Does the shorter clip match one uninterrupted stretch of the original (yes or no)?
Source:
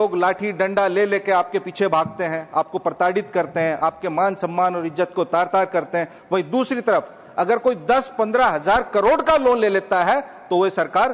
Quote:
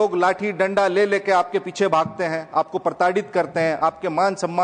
yes